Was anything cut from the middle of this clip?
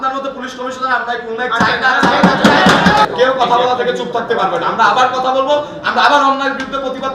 yes; 1 cut; at 3.0 s

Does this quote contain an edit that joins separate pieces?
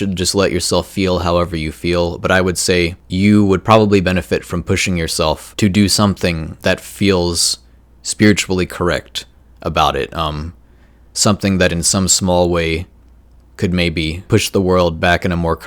yes; 4 cuts; at 3.0 s, 5.5 s, 6.5 s, 14.2 s

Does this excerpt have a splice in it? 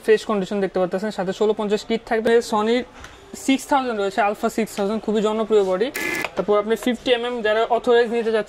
yes; 2 cuts; at 2.3 s, 5.7 s

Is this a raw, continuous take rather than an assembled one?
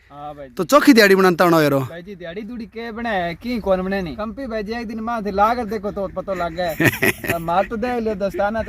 no; 1 cut; at 4.2 s

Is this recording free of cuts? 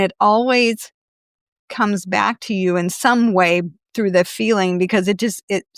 yes; 0 cuts

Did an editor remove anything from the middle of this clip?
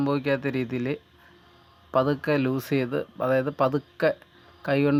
no; 0 cuts

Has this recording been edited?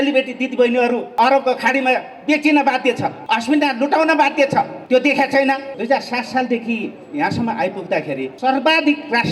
yes; 5 cuts; at 1.1 s, 3.2 s, 4.8 s, 5.7 s, 8.3 s

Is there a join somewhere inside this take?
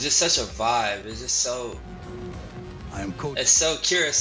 no; 0 cuts

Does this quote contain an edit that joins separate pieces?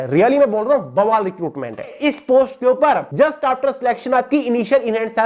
yes; 2 cuts; at 2.0 s, 3.1 s

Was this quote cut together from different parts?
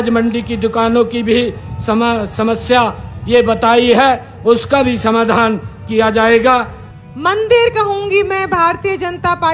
yes; 1 cut; at 6.8 s

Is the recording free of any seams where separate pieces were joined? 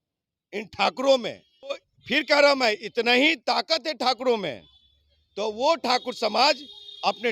no; 1 cut; at 1.9 s

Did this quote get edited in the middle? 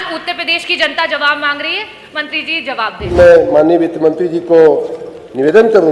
yes; 1 cut; at 3.1 s

